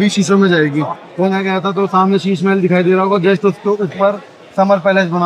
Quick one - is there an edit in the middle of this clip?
yes; 1 cut; at 1.3 s

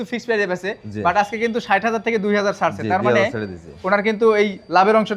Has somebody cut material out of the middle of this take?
no; 0 cuts

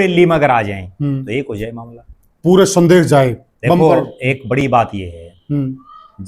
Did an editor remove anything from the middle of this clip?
no; 0 cuts

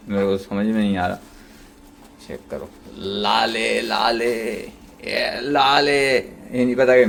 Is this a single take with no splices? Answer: yes; 0 cuts

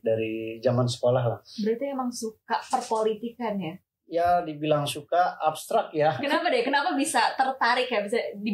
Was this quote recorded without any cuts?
yes; 0 cuts

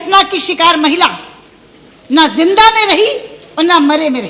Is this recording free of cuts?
yes; 0 cuts

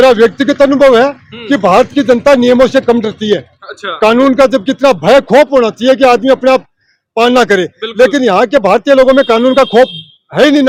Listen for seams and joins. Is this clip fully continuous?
yes; 0 cuts

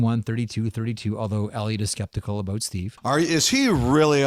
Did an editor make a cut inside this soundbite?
no; 0 cuts

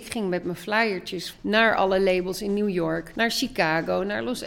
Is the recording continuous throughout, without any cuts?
no; 2 cuts; at 1.2 s, 3.1 s

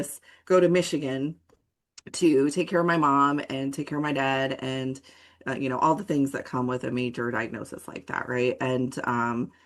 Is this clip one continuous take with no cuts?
yes; 0 cuts

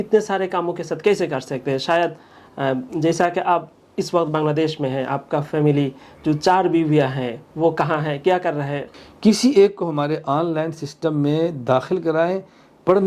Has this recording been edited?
yes; 1 cut; at 8.9 s

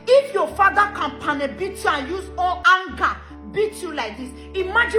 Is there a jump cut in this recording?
no; 0 cuts

